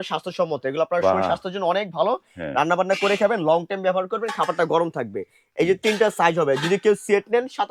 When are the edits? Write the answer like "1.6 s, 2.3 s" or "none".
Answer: none